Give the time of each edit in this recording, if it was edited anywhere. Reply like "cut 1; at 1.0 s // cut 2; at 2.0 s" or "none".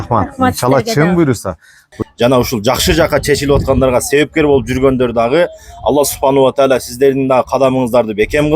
cut 1; at 1.9 s